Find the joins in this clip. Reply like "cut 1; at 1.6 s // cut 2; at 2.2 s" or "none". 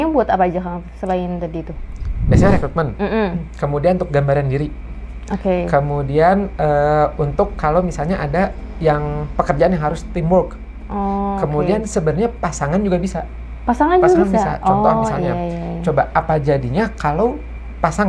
none